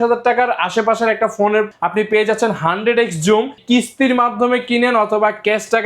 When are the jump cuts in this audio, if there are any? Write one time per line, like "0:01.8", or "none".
0:01.7
0:03.6